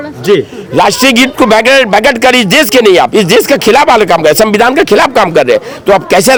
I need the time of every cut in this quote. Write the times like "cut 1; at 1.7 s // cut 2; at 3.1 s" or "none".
none